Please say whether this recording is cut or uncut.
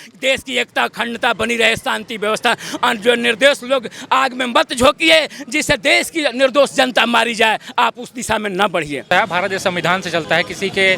cut